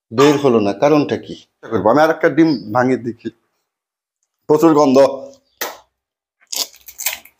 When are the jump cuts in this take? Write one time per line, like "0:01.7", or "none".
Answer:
0:01.7